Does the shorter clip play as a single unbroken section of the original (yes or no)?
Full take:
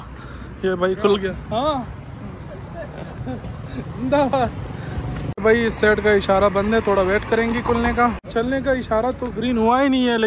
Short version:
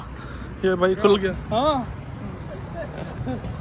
yes